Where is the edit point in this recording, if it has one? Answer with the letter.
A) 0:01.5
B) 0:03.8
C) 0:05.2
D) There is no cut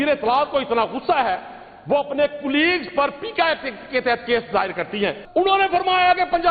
C